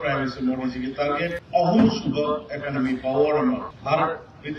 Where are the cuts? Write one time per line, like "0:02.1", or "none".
0:01.4
0:03.7